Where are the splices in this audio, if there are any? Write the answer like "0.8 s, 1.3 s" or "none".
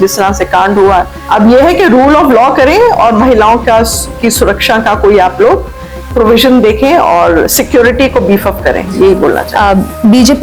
none